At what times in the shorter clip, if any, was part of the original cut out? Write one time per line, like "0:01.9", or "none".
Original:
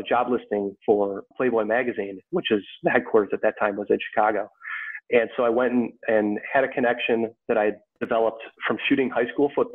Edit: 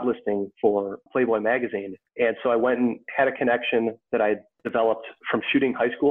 0:01.9
0:03.1